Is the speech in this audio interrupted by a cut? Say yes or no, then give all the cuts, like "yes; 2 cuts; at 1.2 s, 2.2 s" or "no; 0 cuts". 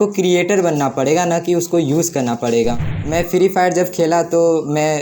yes; 1 cut; at 2.9 s